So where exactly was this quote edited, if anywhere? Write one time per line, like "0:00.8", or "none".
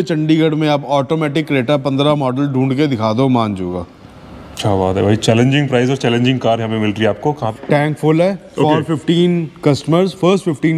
0:07.5